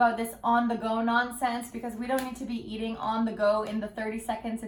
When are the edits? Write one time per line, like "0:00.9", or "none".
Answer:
none